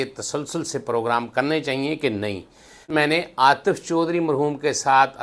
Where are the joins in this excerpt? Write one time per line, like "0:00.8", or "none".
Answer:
0:02.9